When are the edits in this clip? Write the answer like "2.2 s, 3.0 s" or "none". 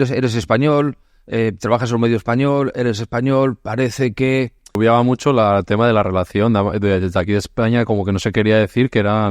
4.8 s